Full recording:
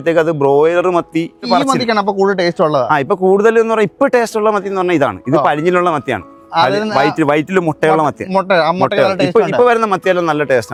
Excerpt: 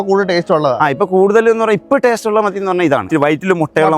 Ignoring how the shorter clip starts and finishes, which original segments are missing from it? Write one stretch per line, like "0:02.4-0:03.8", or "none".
0:05.2-0:07.1